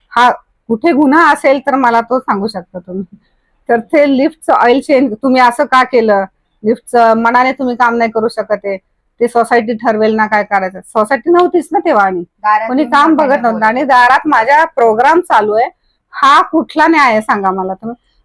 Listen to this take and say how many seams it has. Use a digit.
0